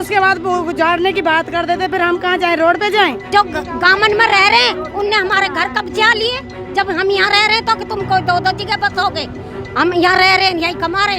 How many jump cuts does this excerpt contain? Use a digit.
1